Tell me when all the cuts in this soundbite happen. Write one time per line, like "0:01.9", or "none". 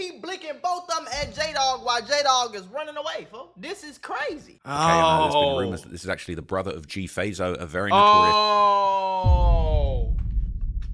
0:04.5